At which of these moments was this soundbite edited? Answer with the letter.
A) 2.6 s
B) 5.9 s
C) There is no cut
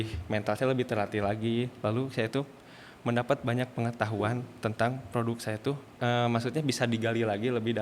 B